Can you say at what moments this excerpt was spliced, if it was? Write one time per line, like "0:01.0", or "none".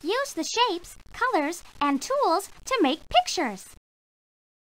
none